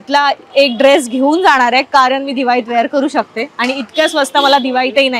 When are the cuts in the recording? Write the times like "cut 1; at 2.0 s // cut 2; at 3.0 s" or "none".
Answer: none